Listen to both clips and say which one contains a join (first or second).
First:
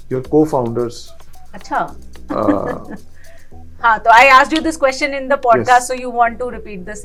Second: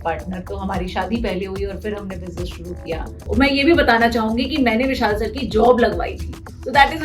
second